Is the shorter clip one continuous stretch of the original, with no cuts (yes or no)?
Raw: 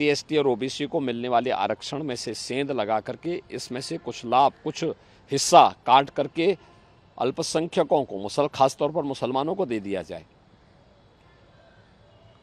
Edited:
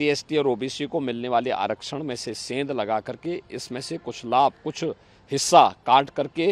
yes